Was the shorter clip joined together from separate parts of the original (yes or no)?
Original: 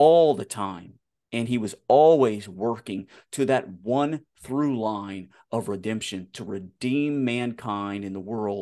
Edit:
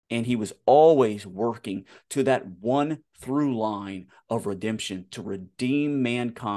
no